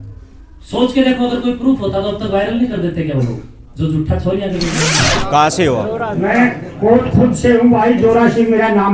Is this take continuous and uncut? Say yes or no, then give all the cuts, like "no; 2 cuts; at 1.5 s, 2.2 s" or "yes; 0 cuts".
no; 1 cut; at 5.0 s